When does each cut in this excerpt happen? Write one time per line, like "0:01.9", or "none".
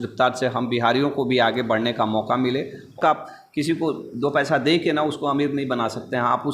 0:03.0